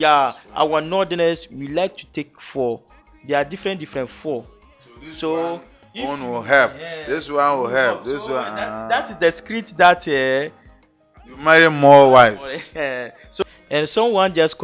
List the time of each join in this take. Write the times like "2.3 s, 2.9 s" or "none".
13.4 s

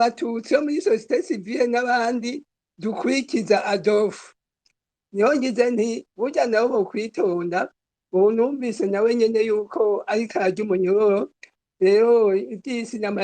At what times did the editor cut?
4.7 s

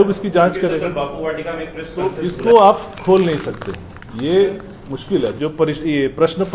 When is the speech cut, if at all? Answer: 2.1 s, 5.3 s

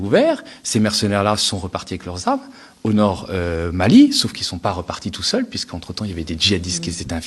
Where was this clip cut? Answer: none

